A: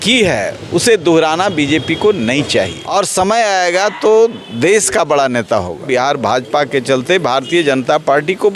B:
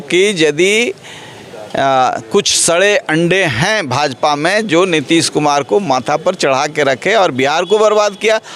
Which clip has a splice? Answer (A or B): A